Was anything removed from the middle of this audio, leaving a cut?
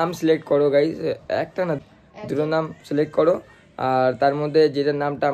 yes; 1 cut; at 1.8 s

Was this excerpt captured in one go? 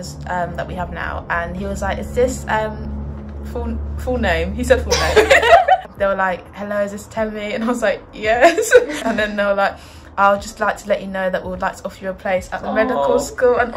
yes; 0 cuts

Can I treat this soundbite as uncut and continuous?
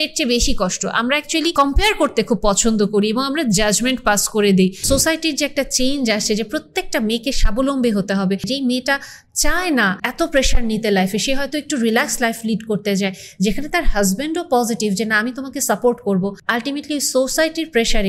no; 5 cuts; at 1.5 s, 4.8 s, 8.5 s, 10.0 s, 16.4 s

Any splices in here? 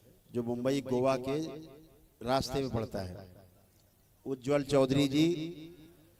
no; 0 cuts

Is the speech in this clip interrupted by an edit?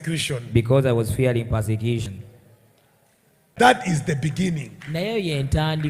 yes; 1 cut; at 3.5 s

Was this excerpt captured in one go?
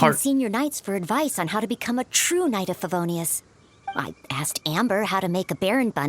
no; 1 cut; at 3.9 s

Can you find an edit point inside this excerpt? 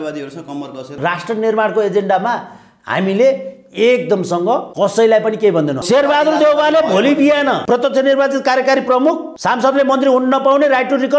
yes; 5 cuts; at 0.9 s, 4.7 s, 5.8 s, 7.6 s, 9.3 s

